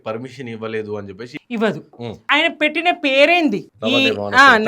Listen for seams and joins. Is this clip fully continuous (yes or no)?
no